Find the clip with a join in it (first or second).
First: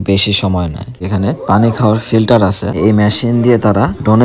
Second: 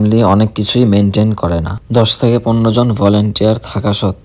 first